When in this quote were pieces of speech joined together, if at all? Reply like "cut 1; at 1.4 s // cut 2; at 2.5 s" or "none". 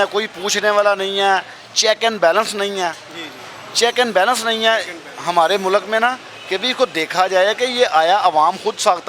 none